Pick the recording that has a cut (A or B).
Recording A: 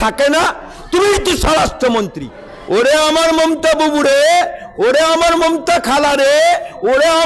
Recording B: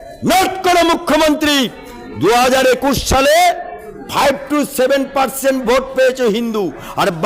A